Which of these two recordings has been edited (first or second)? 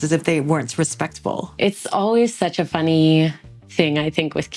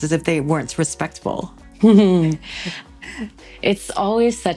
first